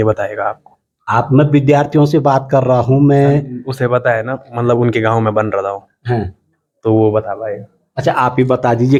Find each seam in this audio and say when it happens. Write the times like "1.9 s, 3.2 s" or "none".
none